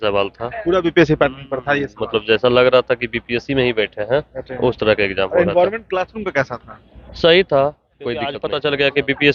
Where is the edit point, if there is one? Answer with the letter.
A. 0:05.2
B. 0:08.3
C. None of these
B